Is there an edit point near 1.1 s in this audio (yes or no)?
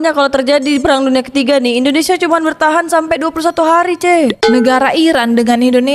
no